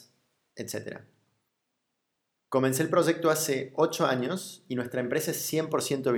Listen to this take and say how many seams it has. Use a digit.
1